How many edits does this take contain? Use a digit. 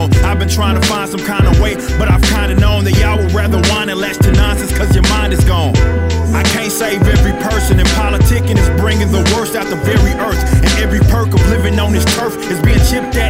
0